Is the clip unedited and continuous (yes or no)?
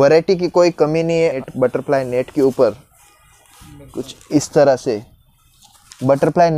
no